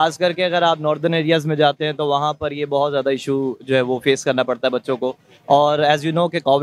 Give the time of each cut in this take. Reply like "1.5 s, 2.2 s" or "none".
none